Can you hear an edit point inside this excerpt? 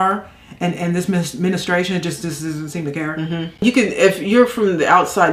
yes; 1 cut; at 3.5 s

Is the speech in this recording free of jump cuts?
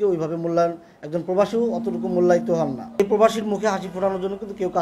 no; 1 cut; at 3.0 s

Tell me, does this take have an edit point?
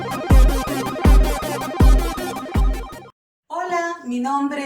yes; 1 cut; at 3.2 s

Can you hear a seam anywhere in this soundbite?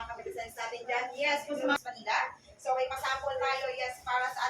yes; 1 cut; at 1.8 s

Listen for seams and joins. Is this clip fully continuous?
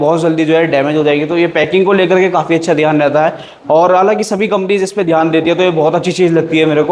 yes; 0 cuts

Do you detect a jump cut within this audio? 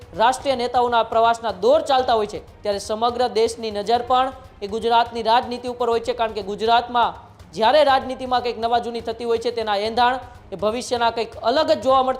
no; 0 cuts

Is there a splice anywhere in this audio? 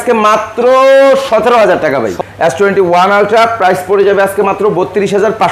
yes; 1 cut; at 2.1 s

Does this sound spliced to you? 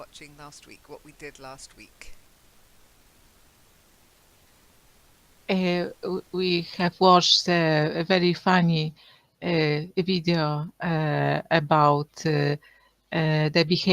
yes; 1 cut; at 10.3 s

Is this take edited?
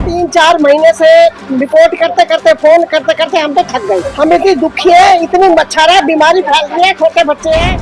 yes; 1 cut; at 4.1 s

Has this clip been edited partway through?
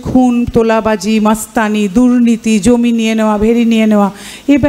no; 0 cuts

